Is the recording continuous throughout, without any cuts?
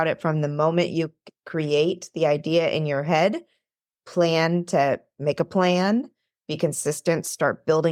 yes; 0 cuts

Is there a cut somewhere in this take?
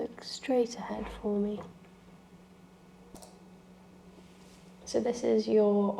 yes; 1 cut; at 3.3 s

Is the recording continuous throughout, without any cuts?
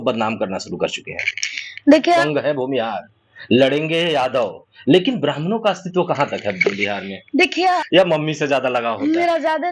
no; 2 cuts; at 2.2 s, 7.8 s

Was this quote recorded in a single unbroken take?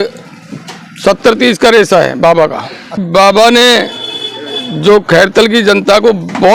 no; 1 cut; at 3.0 s

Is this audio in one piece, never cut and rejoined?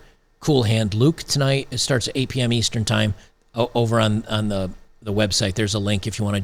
yes; 0 cuts

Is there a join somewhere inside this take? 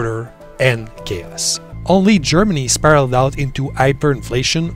yes; 1 cut; at 1.7 s

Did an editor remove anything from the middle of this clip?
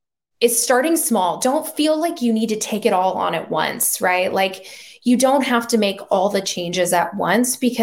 no; 0 cuts

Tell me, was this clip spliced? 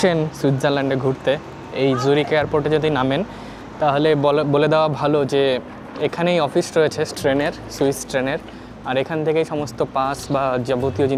no; 0 cuts

